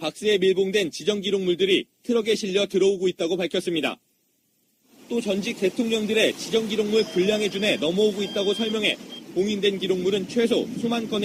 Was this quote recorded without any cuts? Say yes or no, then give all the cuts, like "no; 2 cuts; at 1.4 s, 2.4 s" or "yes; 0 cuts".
yes; 0 cuts